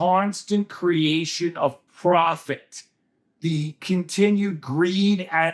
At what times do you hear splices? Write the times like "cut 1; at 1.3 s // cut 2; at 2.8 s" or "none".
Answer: cut 1; at 3.3 s